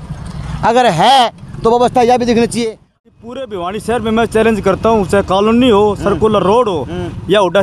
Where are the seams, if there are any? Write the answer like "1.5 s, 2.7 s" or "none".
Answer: 2.9 s